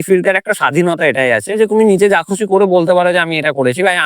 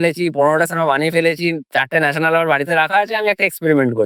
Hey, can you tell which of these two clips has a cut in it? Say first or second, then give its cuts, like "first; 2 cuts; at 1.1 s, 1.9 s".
first; 1 cut; at 1.6 s